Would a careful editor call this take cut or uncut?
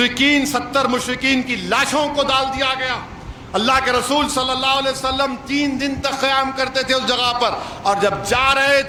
uncut